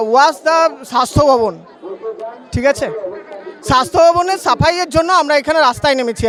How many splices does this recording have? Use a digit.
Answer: 0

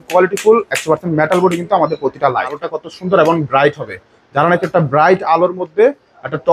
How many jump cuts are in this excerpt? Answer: 1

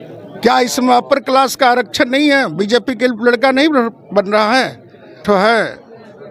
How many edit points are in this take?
1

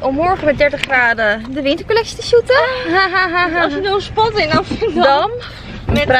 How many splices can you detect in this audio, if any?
0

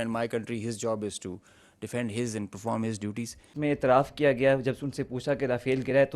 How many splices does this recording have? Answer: 1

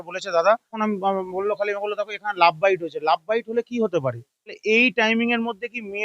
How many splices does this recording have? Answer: 2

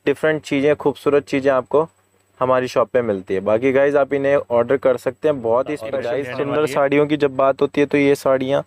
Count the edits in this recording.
1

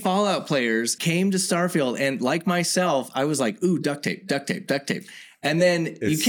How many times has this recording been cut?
1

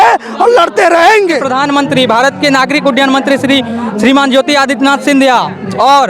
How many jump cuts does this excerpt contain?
1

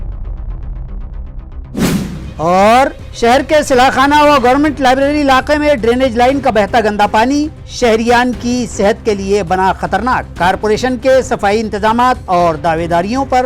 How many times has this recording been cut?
1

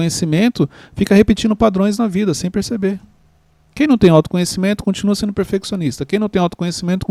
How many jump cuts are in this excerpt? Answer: 0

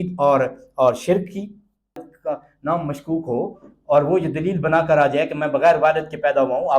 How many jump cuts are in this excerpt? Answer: 1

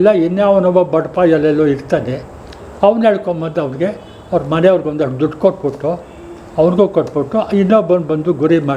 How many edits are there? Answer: 0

